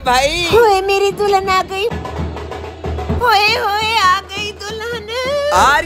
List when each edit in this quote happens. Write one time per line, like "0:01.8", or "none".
0:01.9